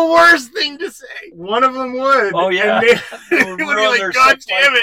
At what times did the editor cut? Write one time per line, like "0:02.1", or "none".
0:01.3